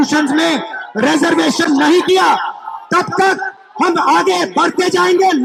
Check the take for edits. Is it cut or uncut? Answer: uncut